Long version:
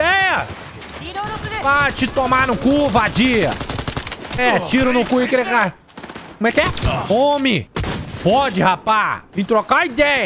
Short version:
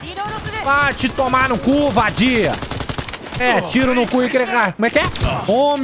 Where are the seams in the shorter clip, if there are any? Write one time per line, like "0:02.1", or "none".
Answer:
0:04.7